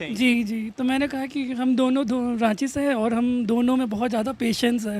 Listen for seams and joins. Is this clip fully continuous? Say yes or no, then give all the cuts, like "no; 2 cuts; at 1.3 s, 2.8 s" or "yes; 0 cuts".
yes; 0 cuts